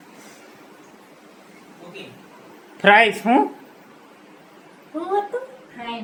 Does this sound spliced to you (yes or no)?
no